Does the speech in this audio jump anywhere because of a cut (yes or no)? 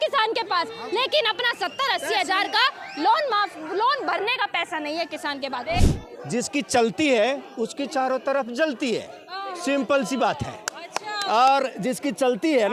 yes